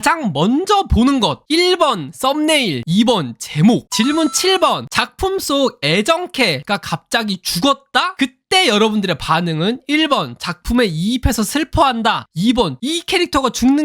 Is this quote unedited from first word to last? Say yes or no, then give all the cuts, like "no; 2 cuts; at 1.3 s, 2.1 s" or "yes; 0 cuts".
no; 2 cuts; at 3.9 s, 6.6 s